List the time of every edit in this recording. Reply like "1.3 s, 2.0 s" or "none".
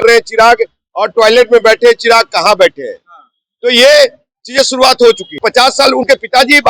5.3 s